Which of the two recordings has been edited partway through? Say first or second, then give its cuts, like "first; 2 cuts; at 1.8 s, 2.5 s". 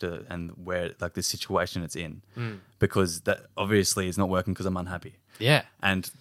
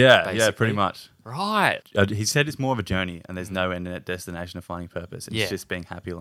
second; 1 cut; at 1.8 s